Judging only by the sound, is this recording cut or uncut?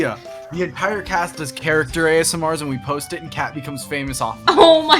uncut